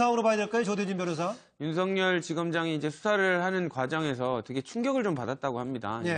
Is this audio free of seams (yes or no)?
no